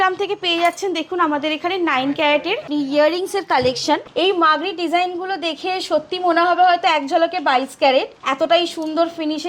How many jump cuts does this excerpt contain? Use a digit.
3